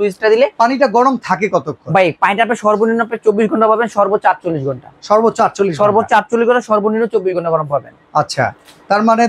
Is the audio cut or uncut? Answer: uncut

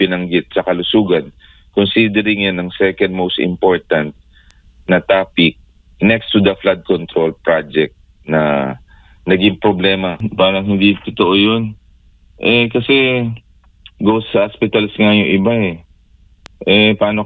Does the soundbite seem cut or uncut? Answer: cut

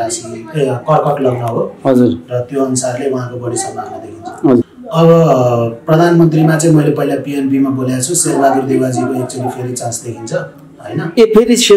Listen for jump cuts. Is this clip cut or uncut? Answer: cut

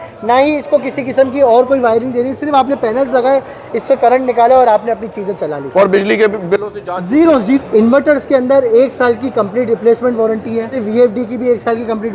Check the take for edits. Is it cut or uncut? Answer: cut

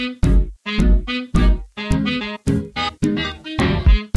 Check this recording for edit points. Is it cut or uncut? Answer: uncut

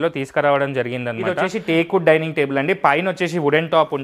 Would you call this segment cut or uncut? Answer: cut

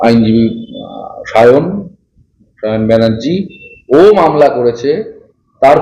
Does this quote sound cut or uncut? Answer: uncut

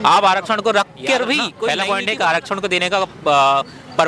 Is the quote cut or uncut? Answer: cut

